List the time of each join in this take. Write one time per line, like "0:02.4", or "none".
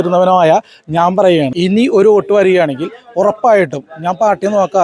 0:01.5

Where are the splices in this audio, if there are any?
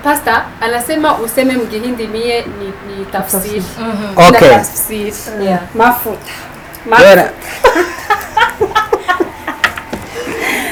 none

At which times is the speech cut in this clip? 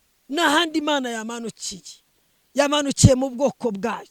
none

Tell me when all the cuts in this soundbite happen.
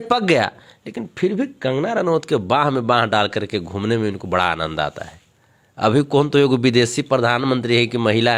none

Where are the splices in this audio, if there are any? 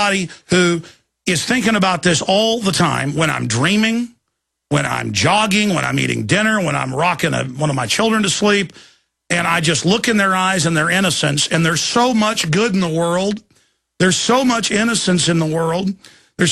0:03.9

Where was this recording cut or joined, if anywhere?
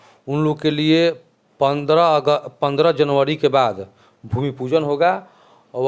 none

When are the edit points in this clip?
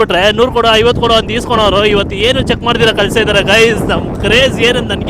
none

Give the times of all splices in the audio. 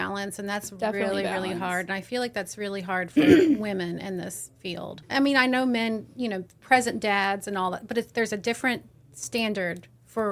0:05.0

